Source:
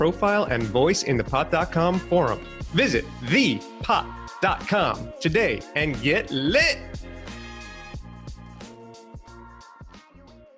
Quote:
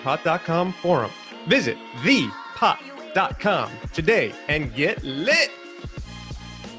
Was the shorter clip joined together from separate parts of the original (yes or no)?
yes